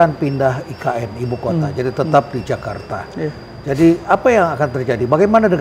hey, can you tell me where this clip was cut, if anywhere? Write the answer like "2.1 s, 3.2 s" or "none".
none